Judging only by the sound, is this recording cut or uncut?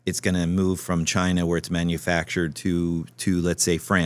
uncut